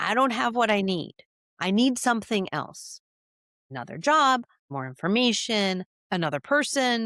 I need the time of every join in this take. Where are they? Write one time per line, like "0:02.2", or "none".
0:03.7
0:04.6
0:06.0